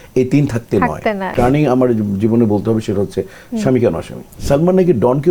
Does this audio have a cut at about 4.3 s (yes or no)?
yes